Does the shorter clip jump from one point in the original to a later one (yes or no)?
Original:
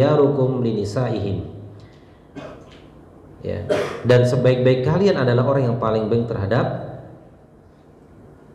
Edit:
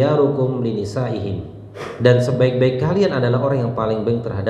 yes